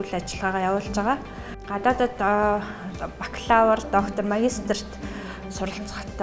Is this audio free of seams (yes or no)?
no